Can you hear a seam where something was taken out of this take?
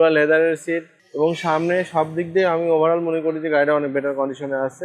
yes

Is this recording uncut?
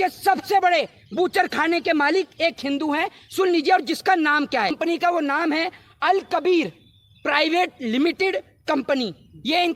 no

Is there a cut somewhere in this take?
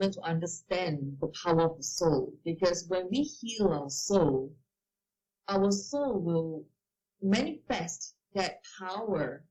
no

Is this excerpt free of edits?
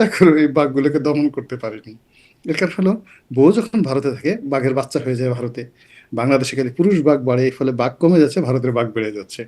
yes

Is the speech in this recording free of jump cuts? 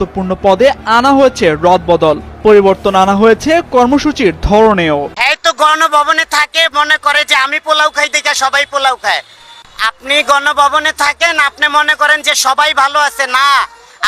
no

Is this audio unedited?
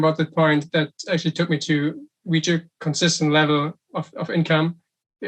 yes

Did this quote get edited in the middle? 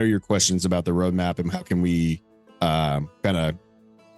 no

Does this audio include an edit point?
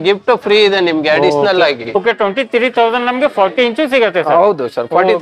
yes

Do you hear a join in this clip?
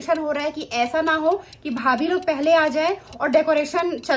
no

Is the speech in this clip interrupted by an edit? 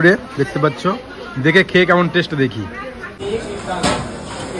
yes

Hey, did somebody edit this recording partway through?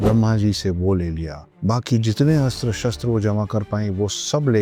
no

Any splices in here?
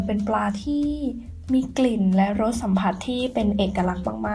no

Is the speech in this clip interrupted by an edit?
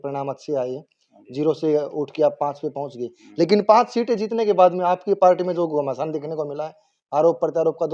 no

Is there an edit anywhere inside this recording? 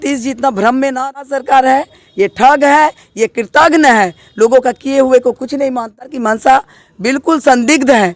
yes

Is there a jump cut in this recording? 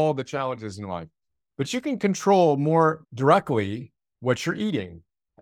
yes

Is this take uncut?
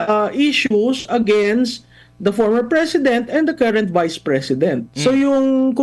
no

